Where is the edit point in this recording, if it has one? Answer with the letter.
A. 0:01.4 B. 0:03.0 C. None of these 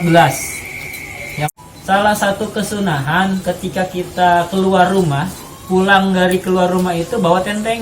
A